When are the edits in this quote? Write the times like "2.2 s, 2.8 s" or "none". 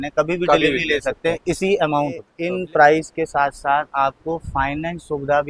2.3 s